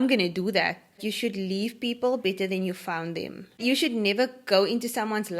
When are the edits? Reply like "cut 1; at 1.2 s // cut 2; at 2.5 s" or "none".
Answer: cut 1; at 1.1 s // cut 2; at 3.6 s

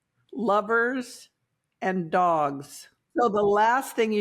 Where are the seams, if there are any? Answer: cut 1; at 3.0 s

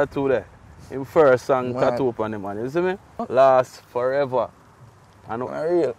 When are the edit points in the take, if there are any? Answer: cut 1; at 3.2 s

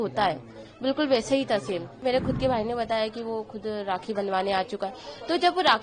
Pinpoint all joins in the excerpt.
cut 1; at 2.0 s

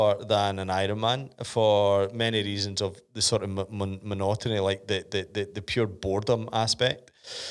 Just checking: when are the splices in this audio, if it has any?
none

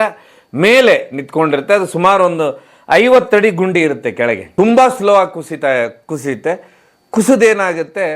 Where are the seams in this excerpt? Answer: cut 1; at 4.5 s

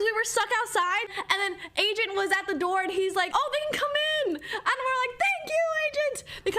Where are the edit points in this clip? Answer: none

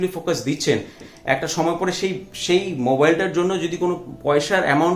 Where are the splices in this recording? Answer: none

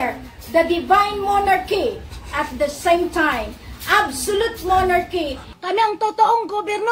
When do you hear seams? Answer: cut 1; at 5.6 s

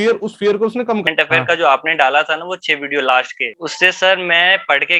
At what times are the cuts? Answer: cut 1; at 1.1 s // cut 2; at 3.4 s

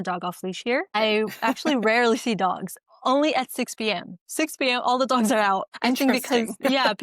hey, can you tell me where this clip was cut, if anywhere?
cut 1; at 1.0 s // cut 2; at 5.7 s

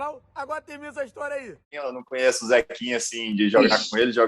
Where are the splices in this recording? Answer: cut 1; at 1.7 s

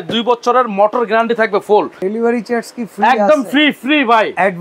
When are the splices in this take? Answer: cut 1; at 2.0 s

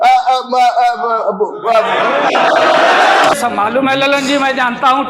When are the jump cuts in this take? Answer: cut 1; at 3.4 s

